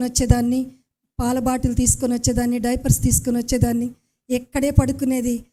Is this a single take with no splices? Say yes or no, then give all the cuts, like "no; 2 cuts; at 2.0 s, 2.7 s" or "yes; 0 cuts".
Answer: yes; 0 cuts